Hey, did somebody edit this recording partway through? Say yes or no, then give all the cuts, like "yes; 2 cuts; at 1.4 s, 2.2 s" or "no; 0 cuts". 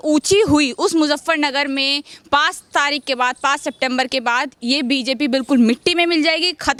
no; 0 cuts